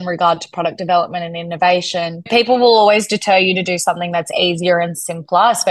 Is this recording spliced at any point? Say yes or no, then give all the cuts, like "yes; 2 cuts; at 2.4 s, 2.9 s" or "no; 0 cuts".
no; 0 cuts